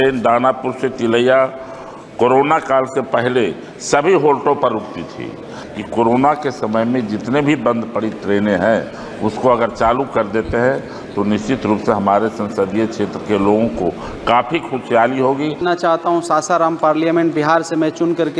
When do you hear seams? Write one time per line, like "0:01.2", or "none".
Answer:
0:05.6
0:15.6